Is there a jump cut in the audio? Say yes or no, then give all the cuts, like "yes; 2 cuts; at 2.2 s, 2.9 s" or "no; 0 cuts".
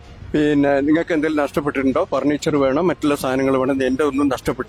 no; 0 cuts